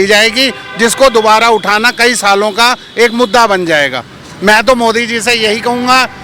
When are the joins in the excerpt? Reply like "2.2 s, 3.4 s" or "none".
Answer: none